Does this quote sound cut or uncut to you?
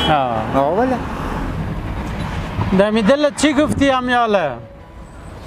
cut